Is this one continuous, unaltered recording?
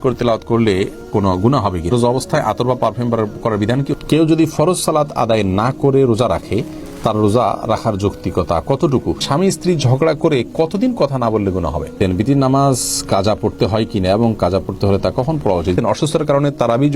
no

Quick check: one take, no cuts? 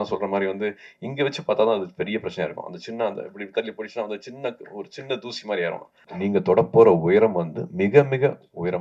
no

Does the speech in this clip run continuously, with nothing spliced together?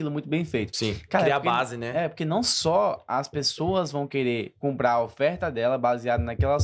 yes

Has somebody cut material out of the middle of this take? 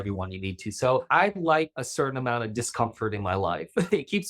yes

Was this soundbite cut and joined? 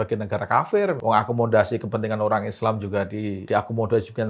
yes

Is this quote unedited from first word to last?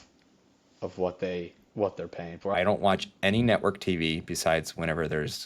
no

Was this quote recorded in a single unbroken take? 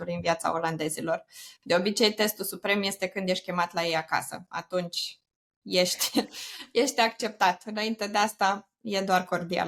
yes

